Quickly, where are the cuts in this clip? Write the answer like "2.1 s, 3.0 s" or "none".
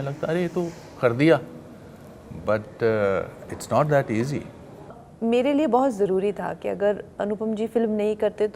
5.0 s